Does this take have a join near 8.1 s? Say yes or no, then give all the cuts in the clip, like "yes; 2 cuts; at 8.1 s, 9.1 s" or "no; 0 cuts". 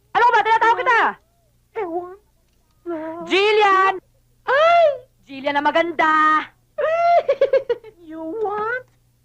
yes; 1 cut; at 8.1 s